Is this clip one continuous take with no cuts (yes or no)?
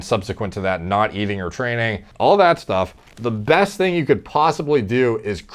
yes